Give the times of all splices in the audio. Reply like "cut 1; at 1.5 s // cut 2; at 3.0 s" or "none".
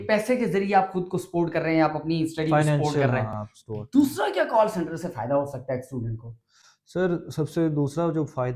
none